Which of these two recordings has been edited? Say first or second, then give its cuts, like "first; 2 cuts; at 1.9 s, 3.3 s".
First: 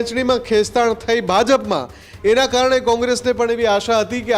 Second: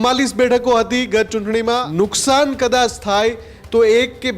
second; 1 cut; at 1.8 s